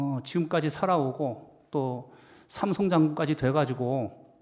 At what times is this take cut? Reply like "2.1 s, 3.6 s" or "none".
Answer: none